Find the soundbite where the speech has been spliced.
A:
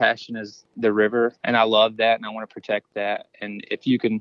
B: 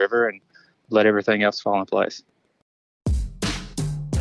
B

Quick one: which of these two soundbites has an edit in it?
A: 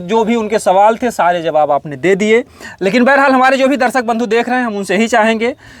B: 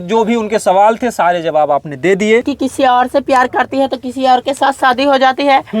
B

